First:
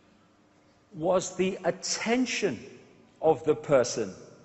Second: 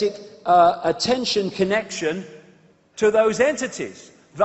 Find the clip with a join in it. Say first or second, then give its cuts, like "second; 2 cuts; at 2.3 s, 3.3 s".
first; 1 cut; at 2.7 s